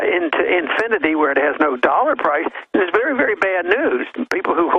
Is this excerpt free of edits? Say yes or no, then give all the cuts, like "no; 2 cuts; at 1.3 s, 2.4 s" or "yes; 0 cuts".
yes; 0 cuts